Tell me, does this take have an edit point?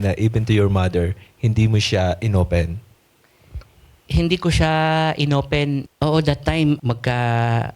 yes; 2 cuts; at 5.9 s, 6.8 s

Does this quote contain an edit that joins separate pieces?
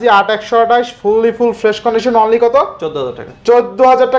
no; 0 cuts

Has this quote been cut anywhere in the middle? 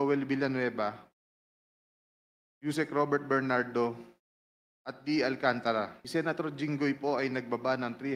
yes; 1 cut; at 6.0 s

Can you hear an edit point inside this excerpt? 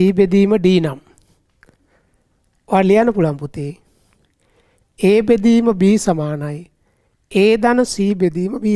no; 0 cuts

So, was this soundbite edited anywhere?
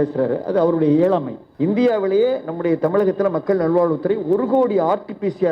yes; 1 cut; at 1.4 s

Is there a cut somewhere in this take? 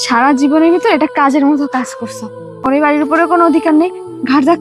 yes; 1 cut; at 2.7 s

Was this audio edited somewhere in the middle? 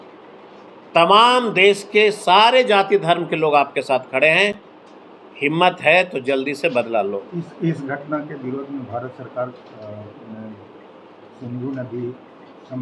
no; 0 cuts

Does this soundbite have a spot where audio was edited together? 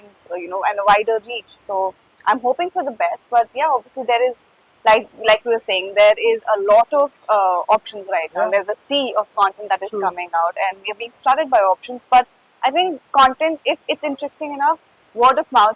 no; 0 cuts

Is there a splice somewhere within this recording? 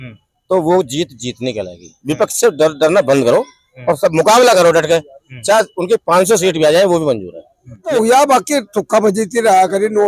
yes; 1 cut; at 7.8 s

